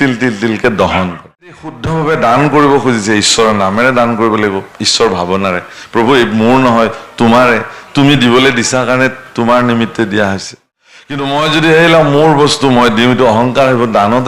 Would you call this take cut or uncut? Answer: cut